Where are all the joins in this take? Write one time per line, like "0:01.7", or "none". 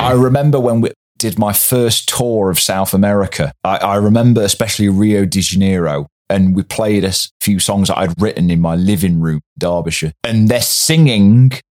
none

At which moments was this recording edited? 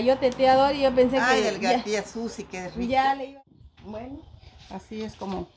0:03.3

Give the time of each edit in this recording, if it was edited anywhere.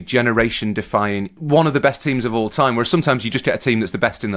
0:01.4

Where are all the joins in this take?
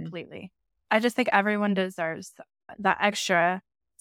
0:00.9
0:02.7

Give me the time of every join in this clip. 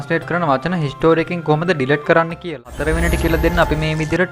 0:02.5

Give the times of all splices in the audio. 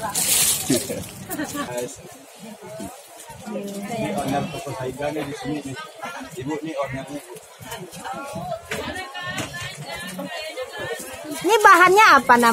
0:01.7

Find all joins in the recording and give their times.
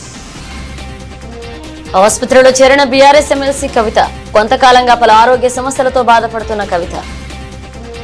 0:07.0

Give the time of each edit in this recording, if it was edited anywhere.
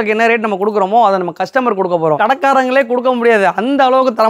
0:02.2

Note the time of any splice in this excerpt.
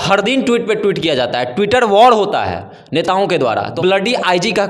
0:03.7

